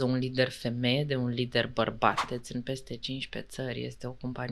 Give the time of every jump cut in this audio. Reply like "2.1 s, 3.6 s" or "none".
2.2 s